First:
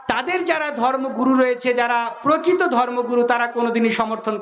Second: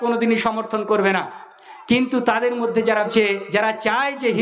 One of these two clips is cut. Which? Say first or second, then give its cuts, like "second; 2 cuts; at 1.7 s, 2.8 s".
second; 1 cut; at 3.1 s